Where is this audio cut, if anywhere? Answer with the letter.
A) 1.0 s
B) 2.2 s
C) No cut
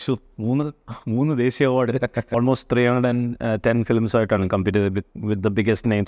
B